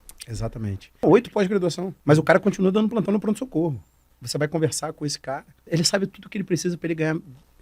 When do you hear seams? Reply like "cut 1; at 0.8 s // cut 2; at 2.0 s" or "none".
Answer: cut 1; at 1.0 s // cut 2; at 1.9 s // cut 3; at 4.2 s // cut 4; at 5.6 s